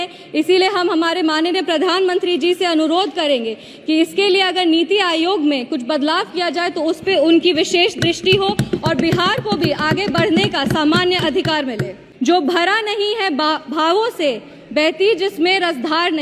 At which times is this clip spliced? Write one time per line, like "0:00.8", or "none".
0:12.0